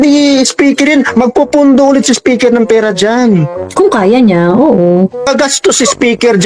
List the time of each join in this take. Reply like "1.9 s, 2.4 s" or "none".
3.6 s, 5.3 s